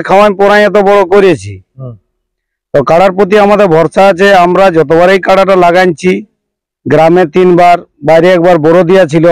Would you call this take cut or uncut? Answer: uncut